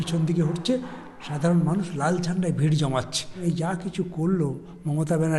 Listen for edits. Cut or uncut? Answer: cut